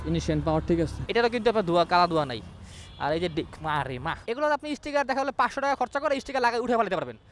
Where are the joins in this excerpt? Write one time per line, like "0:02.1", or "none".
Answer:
0:04.2